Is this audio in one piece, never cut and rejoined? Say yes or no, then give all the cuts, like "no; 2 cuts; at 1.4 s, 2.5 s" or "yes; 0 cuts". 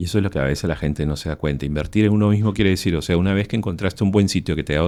yes; 0 cuts